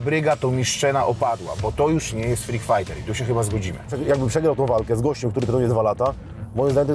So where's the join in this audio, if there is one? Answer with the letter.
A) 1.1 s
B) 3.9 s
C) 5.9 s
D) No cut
B